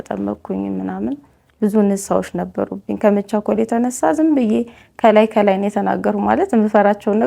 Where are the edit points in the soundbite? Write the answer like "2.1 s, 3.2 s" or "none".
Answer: none

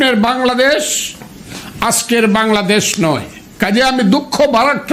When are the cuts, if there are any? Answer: 3.4 s

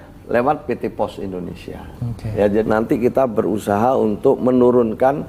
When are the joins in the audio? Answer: 2.6 s

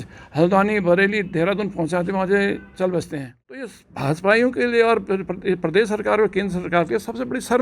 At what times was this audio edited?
3.7 s

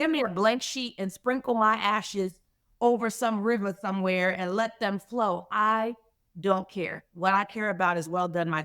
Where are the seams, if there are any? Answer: none

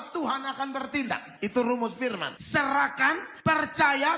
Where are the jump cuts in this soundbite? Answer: 1.3 s, 2.3 s, 3.3 s

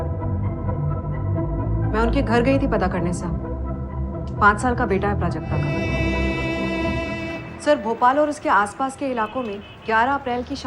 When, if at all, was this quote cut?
5.8 s

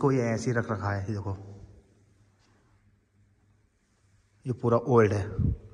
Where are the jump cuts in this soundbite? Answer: none

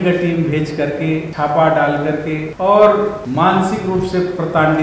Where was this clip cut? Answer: 1.3 s, 2.5 s, 3.2 s

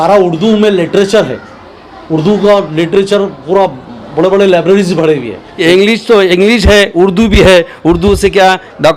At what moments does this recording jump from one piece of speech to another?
5.5 s

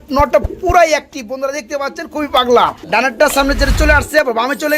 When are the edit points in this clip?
2.8 s

